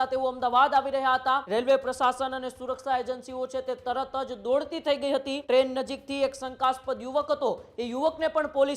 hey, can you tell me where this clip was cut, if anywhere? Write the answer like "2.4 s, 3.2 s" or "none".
1.4 s, 5.3 s